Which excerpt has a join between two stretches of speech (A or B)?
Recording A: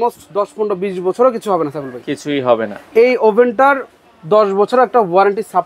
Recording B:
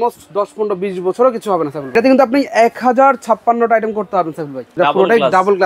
B